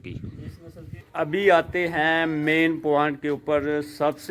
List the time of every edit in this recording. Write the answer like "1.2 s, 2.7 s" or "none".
1.0 s